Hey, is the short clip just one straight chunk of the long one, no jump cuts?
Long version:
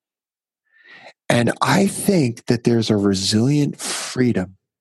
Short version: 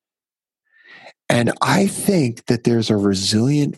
yes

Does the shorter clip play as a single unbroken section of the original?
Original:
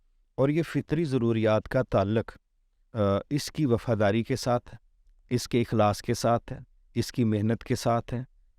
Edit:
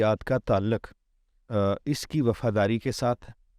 yes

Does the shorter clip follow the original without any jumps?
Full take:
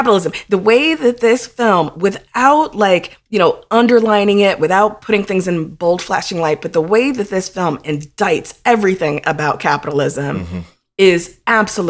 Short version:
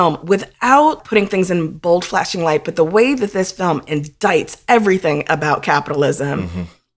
no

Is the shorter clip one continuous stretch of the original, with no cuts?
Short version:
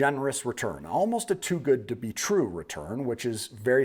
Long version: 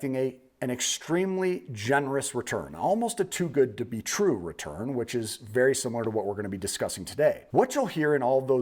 yes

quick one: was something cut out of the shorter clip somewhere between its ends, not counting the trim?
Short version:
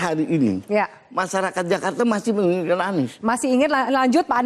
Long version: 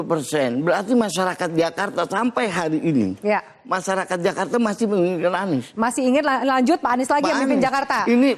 no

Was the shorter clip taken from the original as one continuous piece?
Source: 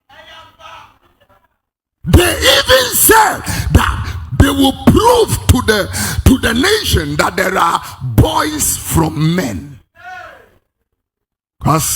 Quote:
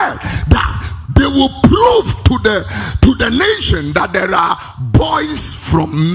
yes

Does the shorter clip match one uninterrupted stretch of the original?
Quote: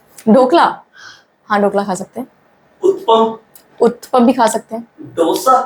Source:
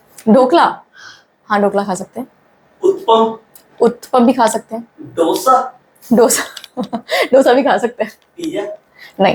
yes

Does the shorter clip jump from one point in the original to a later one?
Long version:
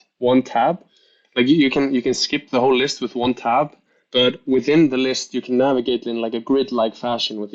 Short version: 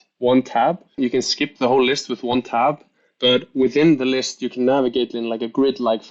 yes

